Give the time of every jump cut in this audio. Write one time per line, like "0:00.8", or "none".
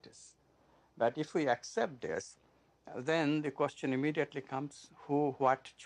0:03.8